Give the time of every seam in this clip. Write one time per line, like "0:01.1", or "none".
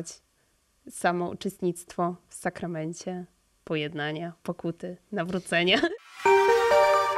0:05.9